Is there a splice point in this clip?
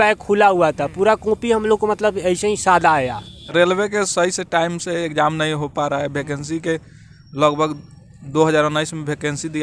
yes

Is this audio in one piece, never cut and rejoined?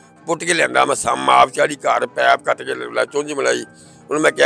yes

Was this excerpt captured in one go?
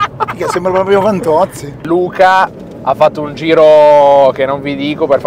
no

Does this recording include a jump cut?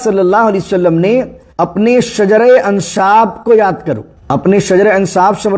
yes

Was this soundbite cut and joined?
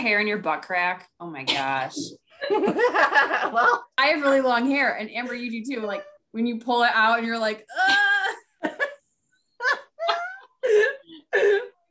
yes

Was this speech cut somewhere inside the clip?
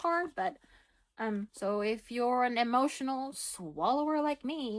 yes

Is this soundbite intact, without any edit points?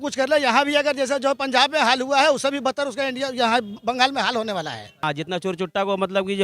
no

